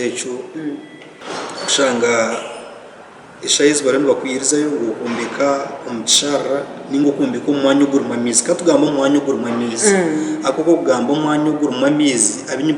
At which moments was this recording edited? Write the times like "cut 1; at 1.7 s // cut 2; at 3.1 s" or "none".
cut 1; at 1.1 s